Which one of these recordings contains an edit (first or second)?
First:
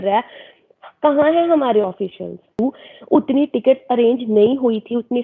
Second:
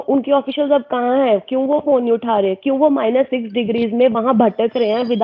first